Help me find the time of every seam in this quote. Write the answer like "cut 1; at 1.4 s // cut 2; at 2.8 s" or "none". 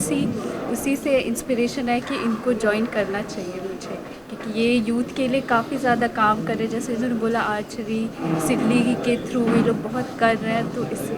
none